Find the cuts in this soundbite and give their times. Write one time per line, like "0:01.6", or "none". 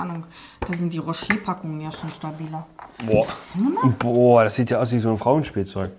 0:03.4